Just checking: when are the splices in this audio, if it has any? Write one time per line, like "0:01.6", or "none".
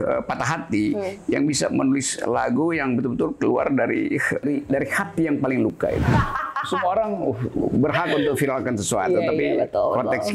0:04.4
0:06.0